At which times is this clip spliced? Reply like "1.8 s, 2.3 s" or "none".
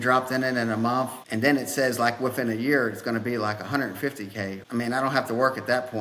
1.2 s, 4.6 s